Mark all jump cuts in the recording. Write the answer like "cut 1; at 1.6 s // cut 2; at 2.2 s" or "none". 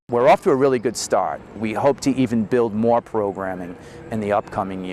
cut 1; at 1.6 s